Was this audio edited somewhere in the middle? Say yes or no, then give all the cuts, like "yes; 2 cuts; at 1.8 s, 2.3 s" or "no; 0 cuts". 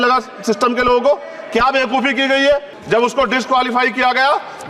yes; 1 cut; at 2.7 s